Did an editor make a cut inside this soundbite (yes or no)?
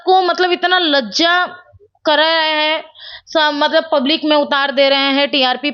no